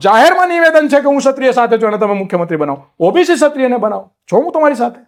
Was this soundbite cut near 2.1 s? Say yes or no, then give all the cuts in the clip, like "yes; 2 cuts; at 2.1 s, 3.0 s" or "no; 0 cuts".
no; 0 cuts